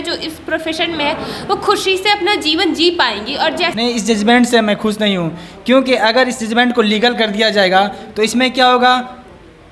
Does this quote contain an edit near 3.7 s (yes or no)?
yes